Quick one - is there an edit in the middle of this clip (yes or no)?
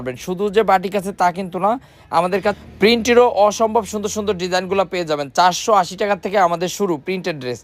no